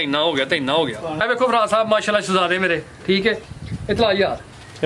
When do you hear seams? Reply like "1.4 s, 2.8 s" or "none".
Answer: 1.2 s